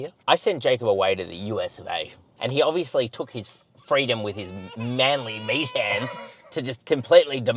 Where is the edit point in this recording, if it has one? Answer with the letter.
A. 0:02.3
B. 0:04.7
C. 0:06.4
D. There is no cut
A